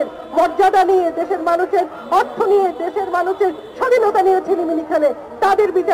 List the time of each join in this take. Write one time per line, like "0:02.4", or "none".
none